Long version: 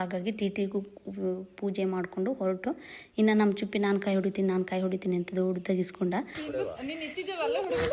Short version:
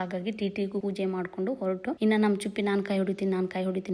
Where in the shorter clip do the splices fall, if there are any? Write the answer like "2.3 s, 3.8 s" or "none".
0.8 s, 2.0 s